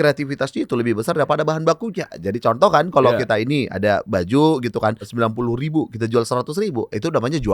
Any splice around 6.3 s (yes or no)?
no